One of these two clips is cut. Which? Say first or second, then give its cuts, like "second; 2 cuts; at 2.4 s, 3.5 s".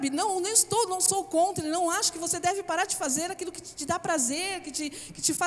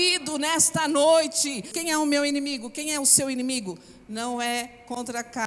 second; 1 cut; at 1.8 s